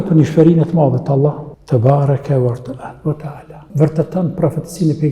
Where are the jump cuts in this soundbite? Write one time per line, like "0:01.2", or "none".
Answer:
0:01.5
0:03.6